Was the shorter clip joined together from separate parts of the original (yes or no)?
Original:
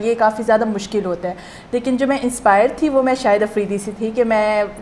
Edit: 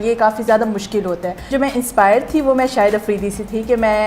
yes